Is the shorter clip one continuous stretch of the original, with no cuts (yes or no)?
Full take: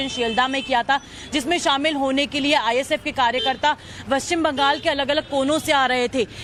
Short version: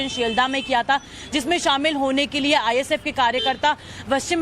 yes